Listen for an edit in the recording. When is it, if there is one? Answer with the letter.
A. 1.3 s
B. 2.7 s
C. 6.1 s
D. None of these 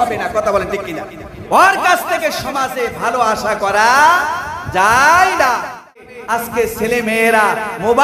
C